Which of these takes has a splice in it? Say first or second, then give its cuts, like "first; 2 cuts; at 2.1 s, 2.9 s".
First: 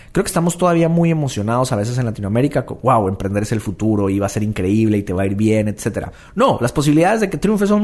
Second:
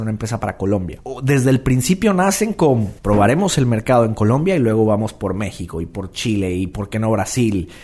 second; 2 cuts; at 1.0 s, 2.9 s